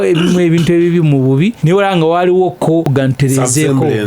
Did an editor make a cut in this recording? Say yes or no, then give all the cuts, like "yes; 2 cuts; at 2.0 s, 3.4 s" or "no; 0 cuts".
yes; 2 cuts; at 1.6 s, 2.9 s